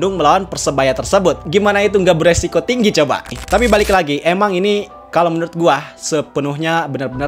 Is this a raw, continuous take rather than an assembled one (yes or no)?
no